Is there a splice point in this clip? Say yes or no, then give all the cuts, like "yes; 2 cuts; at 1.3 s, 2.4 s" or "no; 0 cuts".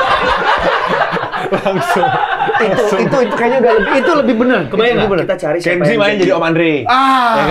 no; 0 cuts